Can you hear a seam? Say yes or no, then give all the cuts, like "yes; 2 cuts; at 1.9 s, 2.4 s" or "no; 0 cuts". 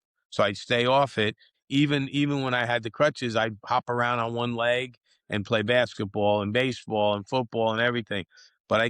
yes; 1 cut; at 1.5 s